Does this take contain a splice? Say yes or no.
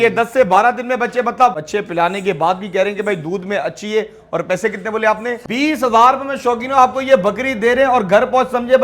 yes